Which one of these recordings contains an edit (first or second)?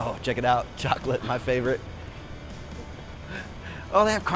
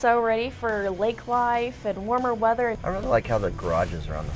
second